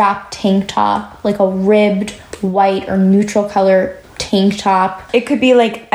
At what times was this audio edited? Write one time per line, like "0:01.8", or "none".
0:04.0
0:05.0